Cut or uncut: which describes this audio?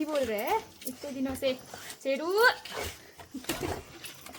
uncut